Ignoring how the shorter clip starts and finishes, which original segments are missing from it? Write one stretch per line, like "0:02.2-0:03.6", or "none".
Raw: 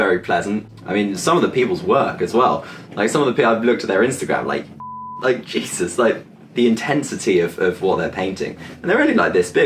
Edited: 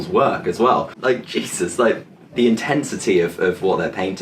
0:02.7-0:05.1